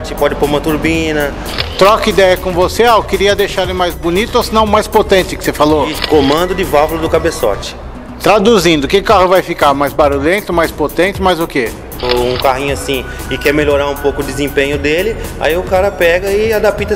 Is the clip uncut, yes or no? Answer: no